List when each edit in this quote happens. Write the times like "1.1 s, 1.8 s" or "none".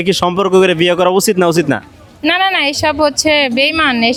none